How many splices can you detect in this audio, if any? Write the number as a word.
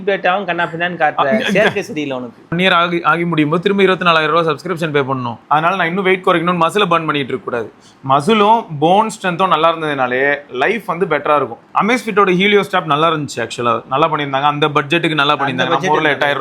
three